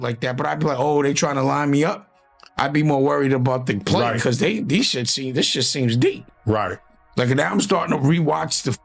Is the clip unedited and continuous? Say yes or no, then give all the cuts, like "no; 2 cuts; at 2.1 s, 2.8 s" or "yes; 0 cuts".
yes; 0 cuts